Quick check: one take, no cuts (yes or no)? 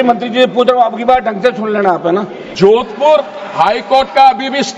no